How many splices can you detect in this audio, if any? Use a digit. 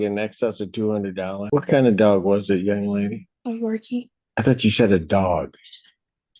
2